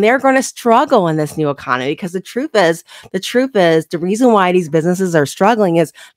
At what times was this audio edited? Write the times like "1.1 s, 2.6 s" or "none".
none